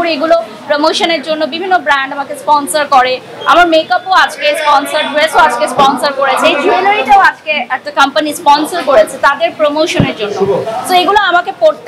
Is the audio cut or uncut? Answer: uncut